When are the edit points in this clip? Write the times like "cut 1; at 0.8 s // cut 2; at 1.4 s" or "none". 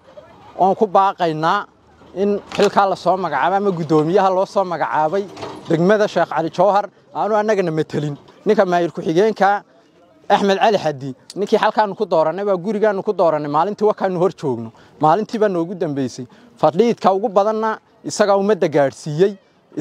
cut 1; at 8.3 s

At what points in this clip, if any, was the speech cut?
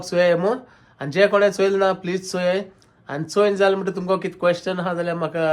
none

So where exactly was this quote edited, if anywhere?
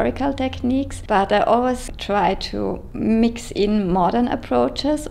cut 1; at 1.0 s // cut 2; at 2.9 s

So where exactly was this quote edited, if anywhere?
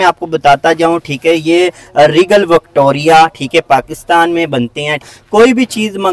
cut 1; at 5.1 s

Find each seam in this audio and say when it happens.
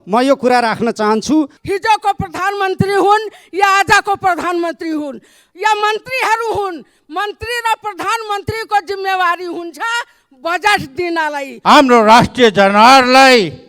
cut 1; at 1.6 s // cut 2; at 11.5 s

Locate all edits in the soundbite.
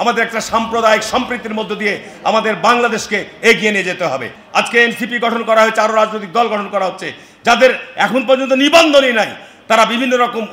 cut 1; at 4.3 s

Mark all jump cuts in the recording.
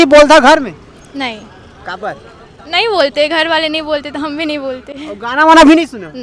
none

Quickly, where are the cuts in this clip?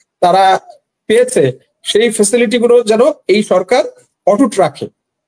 none

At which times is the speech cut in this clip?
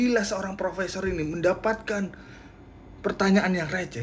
none

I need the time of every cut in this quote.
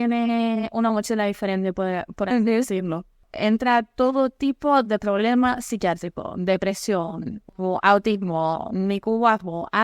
cut 1; at 7.3 s

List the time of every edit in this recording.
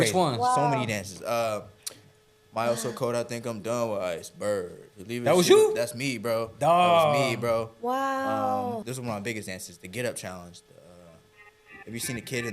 cut 1; at 8.8 s

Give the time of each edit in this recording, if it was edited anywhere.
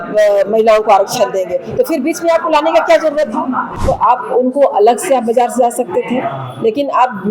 cut 1; at 3.8 s

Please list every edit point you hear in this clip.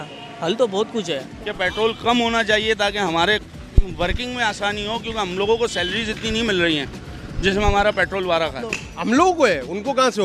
cut 1; at 1.3 s // cut 2; at 8.9 s

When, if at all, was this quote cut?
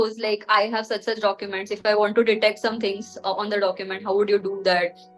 none

